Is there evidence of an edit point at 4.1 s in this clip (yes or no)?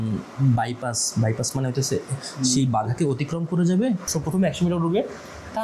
yes